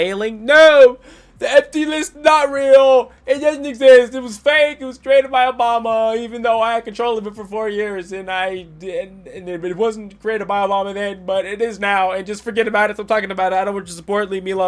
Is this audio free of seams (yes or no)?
yes